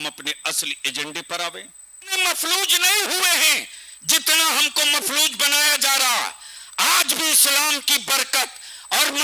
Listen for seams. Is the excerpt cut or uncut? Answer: cut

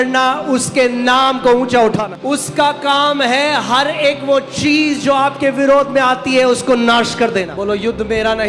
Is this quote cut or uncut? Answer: cut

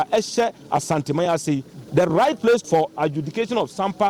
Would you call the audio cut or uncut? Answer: cut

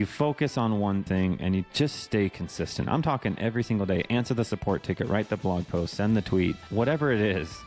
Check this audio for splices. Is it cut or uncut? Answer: cut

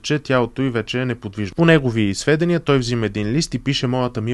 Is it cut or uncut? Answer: cut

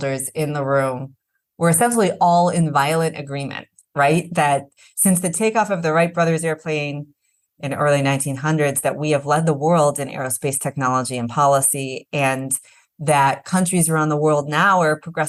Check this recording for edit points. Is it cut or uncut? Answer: uncut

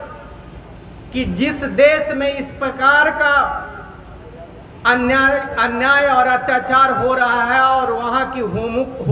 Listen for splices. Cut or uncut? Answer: uncut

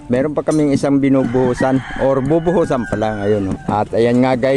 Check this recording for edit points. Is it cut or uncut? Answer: cut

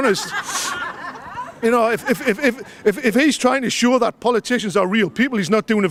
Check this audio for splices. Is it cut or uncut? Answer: uncut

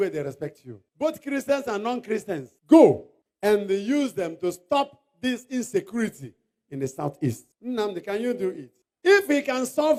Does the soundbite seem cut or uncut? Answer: uncut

